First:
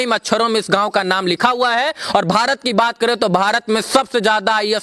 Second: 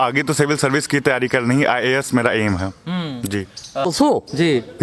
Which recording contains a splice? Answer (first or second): second